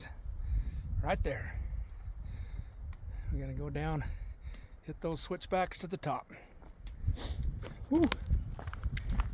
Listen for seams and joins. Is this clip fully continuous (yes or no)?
yes